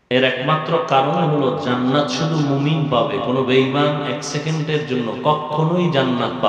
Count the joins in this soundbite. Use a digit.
0